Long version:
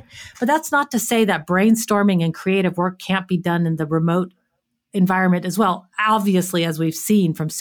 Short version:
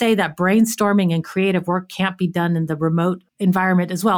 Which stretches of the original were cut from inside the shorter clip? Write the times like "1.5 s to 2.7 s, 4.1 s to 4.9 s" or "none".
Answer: 4.4 s to 4.8 s